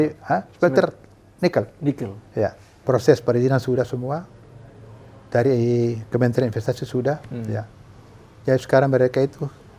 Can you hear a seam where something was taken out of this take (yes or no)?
yes